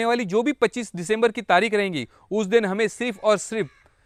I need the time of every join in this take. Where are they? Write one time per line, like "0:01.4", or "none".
none